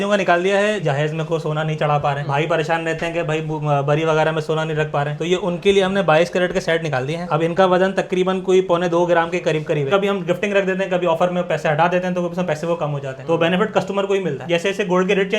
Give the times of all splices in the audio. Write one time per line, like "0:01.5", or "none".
0:00.8
0:09.9
0:14.4